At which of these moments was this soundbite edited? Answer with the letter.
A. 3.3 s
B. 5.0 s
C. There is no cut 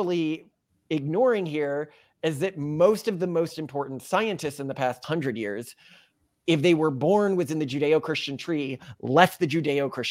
B